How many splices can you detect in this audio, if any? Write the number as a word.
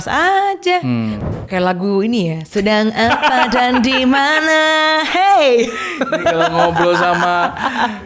one